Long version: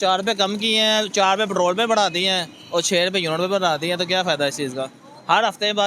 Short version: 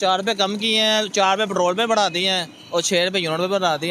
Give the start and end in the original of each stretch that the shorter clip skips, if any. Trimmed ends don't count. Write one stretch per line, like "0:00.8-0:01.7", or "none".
none